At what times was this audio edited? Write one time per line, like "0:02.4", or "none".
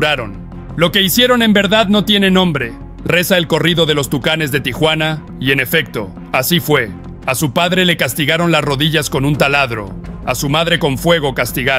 0:05.3